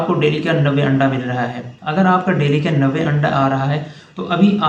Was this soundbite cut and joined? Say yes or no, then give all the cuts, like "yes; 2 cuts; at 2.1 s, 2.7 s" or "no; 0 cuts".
no; 0 cuts